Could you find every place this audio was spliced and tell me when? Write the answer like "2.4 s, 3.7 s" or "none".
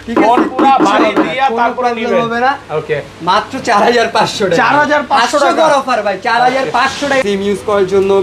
7.2 s